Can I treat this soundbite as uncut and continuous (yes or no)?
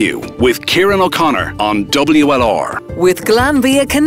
yes